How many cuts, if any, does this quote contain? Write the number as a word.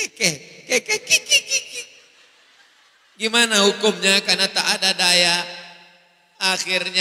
zero